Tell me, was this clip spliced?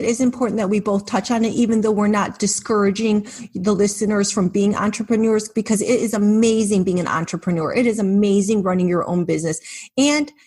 no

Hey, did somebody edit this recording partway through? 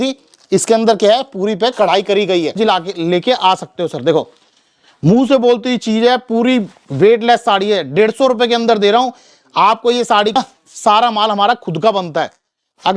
yes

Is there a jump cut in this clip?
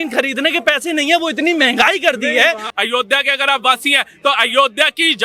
yes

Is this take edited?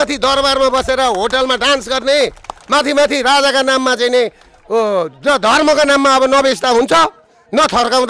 no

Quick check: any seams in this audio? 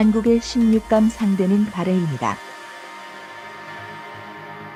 no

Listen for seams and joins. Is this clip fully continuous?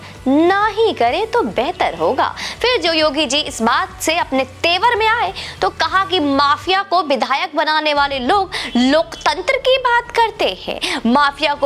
yes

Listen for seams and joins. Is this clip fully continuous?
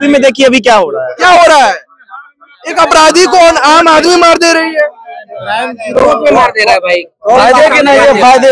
yes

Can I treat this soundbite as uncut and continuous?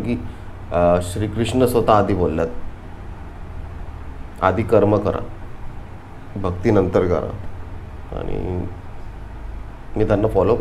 yes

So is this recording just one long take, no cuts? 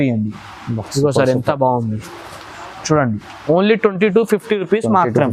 yes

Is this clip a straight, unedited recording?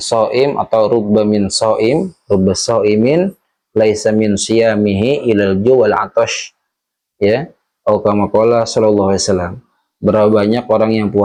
yes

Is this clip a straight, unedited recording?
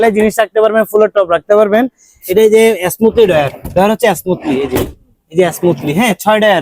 yes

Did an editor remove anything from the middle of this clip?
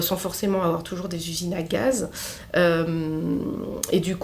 no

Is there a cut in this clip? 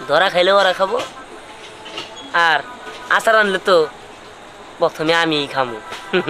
no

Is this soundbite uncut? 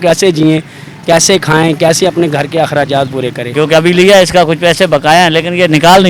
no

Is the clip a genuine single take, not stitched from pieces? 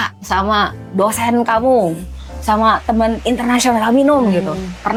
yes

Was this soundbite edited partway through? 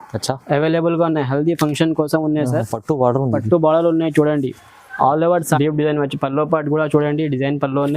yes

